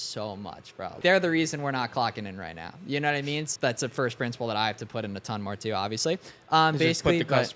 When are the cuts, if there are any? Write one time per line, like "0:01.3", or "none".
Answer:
0:01.0
0:03.5